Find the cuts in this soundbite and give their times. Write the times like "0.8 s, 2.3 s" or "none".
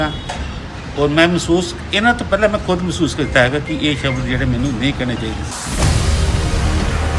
5.4 s

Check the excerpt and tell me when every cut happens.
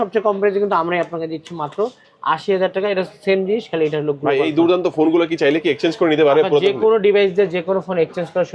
none

